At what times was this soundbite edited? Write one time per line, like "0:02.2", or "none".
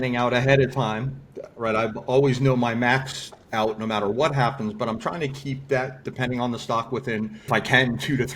0:07.5

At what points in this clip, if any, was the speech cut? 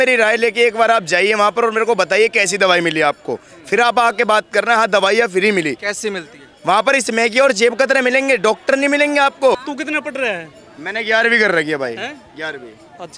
0:09.6

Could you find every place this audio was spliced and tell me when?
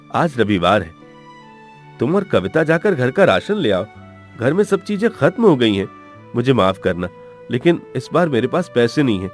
none

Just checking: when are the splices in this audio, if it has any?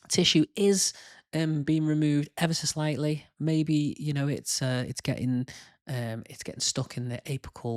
none

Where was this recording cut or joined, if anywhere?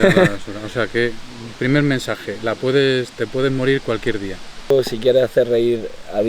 0:04.7

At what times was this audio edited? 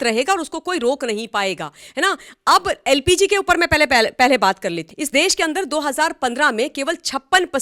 0:04.9

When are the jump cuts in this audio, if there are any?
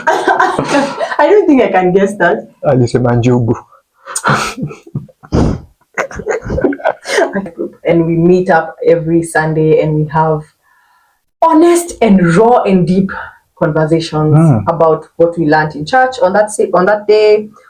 0:07.4

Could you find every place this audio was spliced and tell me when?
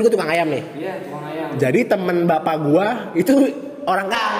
none

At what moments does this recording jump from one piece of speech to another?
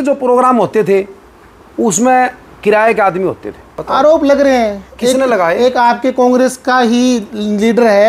0:03.7

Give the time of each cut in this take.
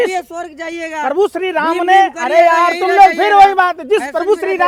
none

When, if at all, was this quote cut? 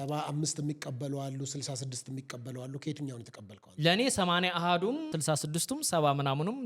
0:05.1

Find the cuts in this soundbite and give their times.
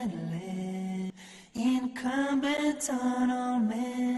0:01.1

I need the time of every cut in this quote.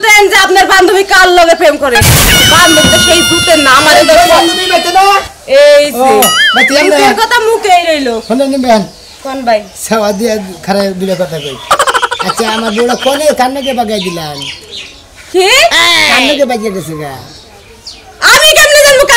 none

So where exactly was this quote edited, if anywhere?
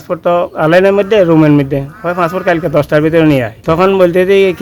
0:03.5

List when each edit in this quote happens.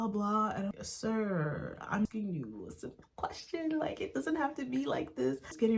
0:00.7
0:01.7

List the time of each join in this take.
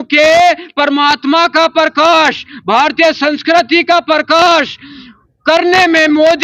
none

